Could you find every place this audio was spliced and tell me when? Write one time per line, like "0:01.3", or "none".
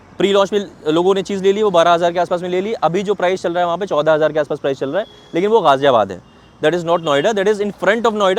none

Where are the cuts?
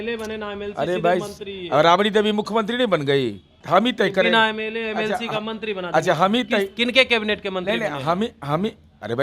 0:03.5

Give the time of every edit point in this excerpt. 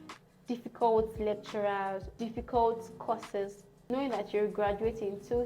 0:02.1
0:03.7

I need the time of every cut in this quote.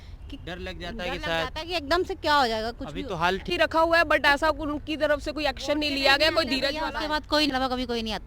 0:03.5
0:07.5

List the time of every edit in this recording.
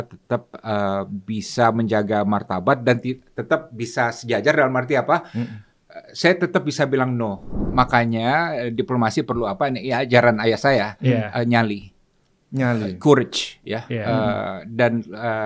0:07.6

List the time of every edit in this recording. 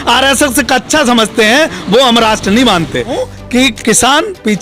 0:03.2

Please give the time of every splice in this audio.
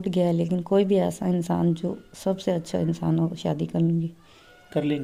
none

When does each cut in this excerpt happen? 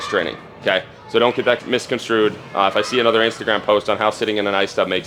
0:01.6

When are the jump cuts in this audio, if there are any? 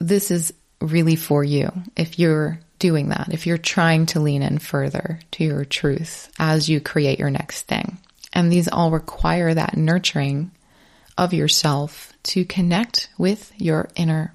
none

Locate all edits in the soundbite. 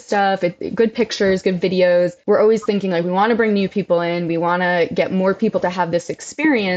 0:02.2

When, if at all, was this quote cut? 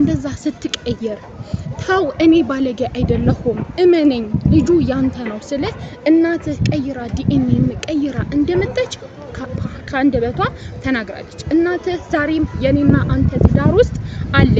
none

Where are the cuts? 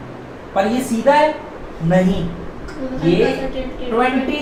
none

